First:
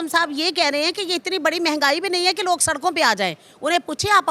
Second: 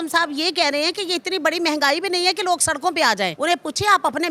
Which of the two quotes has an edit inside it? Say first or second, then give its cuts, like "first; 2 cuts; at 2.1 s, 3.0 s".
second; 1 cut; at 3.3 s